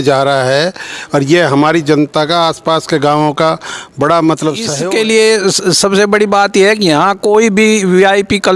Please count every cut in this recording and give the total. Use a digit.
1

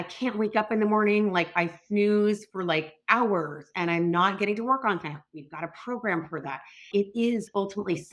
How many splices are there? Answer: 1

